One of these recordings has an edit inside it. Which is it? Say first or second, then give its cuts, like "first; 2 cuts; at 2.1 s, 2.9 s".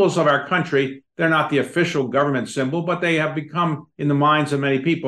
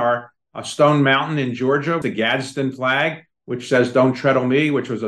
second; 1 cut; at 2.0 s